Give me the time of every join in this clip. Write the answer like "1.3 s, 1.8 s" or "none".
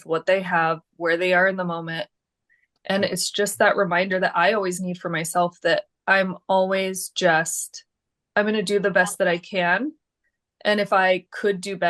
none